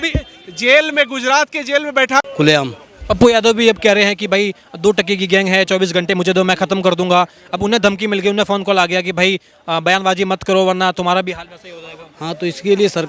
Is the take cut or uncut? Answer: cut